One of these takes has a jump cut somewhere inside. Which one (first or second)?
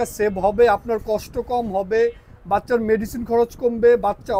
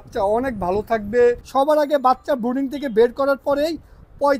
second